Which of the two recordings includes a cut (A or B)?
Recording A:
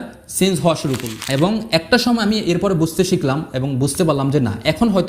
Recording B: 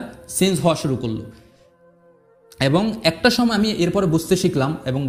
A